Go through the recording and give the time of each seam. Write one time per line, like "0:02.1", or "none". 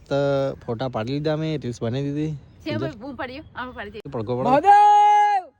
0:04.1